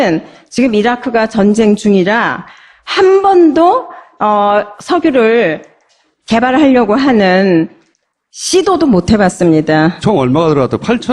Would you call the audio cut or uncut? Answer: uncut